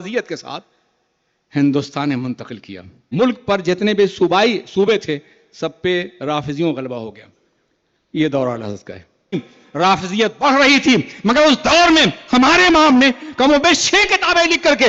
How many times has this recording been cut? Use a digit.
2